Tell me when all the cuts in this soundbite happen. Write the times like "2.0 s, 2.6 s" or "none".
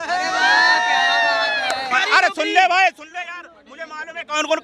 1.9 s